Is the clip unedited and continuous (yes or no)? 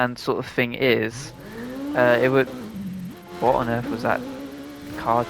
yes